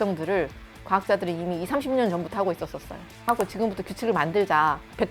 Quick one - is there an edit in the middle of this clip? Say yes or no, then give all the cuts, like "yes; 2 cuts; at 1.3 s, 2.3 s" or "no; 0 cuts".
yes; 1 cut; at 3.2 s